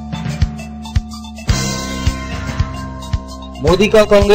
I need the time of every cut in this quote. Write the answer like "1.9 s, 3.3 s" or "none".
3.3 s